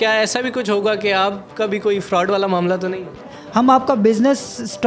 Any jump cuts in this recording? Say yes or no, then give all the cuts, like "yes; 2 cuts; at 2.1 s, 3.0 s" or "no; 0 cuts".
yes; 1 cut; at 3.3 s